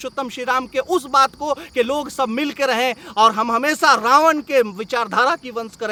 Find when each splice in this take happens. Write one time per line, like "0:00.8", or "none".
none